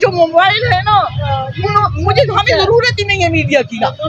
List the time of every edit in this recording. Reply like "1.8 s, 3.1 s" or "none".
none